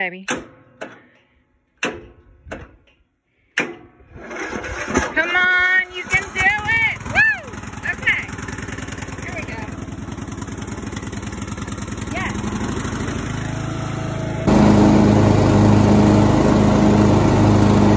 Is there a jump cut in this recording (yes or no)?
no